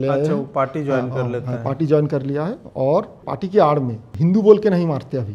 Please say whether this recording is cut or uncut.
cut